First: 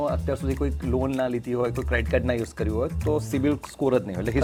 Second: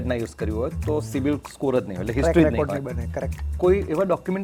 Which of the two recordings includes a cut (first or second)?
second